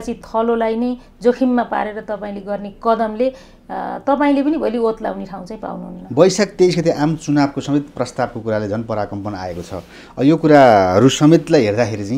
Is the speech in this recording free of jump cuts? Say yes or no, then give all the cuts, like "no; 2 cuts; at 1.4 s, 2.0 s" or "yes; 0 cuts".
yes; 0 cuts